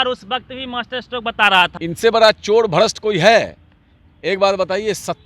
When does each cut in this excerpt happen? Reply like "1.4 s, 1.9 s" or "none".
1.7 s